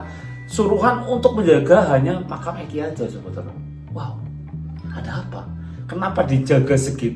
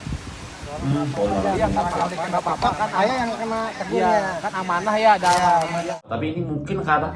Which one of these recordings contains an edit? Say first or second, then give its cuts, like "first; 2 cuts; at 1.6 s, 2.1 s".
second; 1 cut; at 6.1 s